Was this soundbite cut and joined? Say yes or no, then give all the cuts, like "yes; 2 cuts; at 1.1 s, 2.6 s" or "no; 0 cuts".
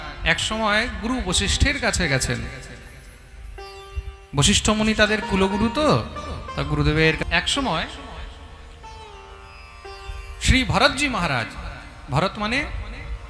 yes; 1 cut; at 7.2 s